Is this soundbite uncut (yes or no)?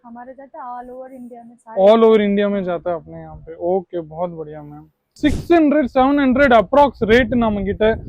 no